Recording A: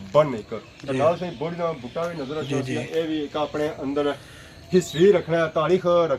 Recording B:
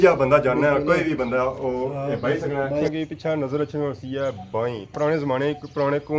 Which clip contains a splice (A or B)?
B